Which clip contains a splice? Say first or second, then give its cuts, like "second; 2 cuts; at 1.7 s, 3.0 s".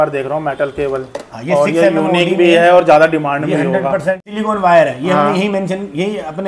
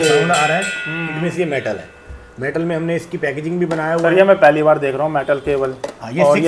first; 1 cut; at 4.3 s